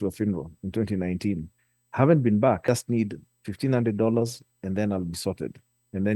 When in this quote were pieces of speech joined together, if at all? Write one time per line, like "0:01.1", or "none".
0:02.7